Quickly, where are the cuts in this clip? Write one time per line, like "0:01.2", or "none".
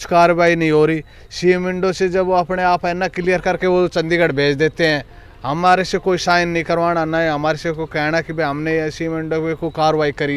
none